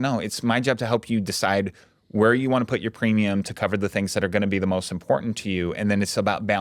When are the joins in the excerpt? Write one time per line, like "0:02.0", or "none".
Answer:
none